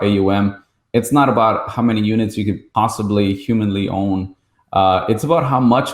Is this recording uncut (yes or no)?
yes